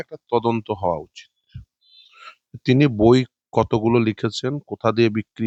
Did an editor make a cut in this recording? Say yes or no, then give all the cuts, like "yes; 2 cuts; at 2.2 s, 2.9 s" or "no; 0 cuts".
no; 0 cuts